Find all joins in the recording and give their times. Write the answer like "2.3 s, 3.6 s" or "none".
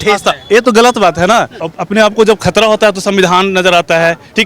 1.6 s